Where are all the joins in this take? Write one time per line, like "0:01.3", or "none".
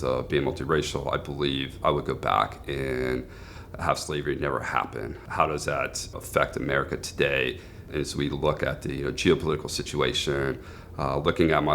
0:05.2
0:06.1
0:07.8